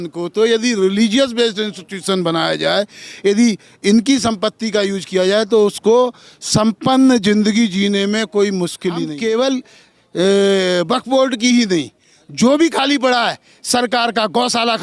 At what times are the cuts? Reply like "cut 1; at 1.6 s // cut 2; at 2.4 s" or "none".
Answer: cut 1; at 9.0 s